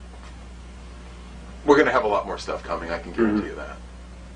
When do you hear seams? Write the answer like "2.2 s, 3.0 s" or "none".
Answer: 1.4 s